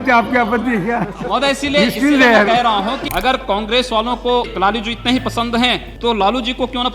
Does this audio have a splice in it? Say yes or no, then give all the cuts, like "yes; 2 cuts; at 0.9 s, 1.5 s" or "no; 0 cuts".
yes; 3 cuts; at 3.1 s, 4.5 s, 5.9 s